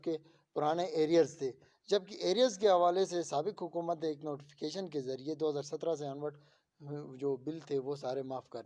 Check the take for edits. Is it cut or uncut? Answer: uncut